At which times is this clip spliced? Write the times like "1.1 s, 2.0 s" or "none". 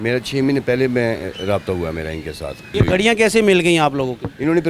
2.7 s